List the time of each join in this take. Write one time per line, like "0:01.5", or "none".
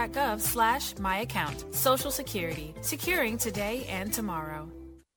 0:01.5